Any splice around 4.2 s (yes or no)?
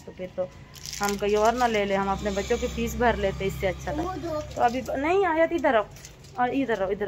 no